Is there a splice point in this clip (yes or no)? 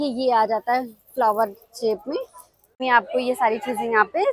yes